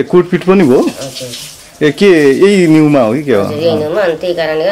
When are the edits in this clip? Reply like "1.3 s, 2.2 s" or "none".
none